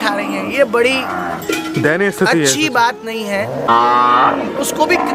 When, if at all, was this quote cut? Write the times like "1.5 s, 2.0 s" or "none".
3.7 s

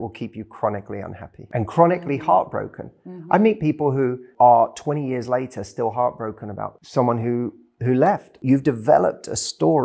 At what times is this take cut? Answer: 1.3 s, 4.3 s, 6.8 s, 8.4 s

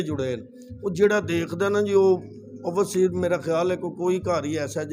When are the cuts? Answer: none

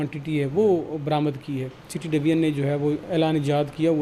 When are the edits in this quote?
1.9 s

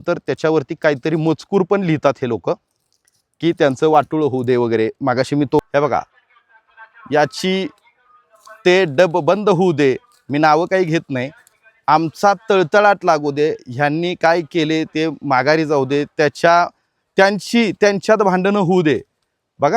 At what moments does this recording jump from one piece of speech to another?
5.6 s

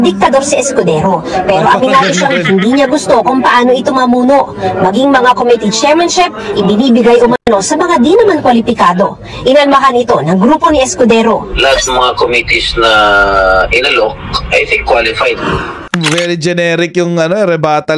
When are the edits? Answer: none

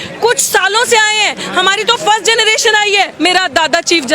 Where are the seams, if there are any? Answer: 3.1 s

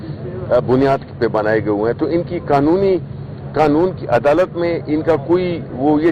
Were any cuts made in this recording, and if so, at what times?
none

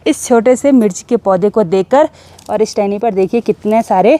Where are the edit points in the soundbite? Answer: 2.3 s

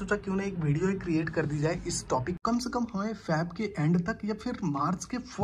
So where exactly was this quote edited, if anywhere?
2.3 s

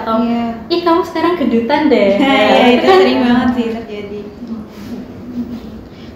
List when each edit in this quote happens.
none

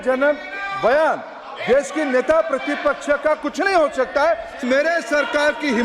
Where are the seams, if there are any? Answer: 4.6 s

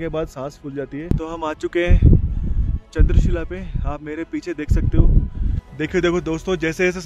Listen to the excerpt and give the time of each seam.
1.0 s, 5.6 s

